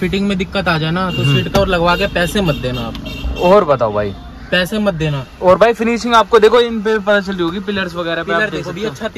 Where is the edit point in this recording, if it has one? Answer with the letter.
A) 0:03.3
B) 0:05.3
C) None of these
C